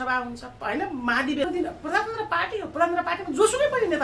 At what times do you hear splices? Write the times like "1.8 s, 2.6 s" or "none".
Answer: 1.5 s